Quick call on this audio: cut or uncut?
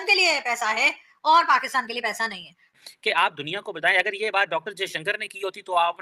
cut